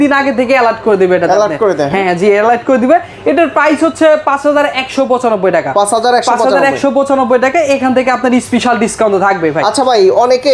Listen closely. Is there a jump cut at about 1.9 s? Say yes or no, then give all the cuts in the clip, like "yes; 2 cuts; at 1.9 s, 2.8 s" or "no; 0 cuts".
no; 0 cuts